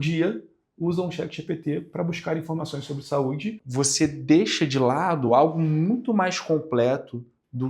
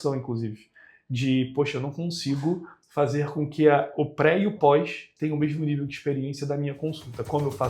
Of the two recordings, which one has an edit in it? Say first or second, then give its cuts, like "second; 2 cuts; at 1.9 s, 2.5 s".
first; 1 cut; at 3.6 s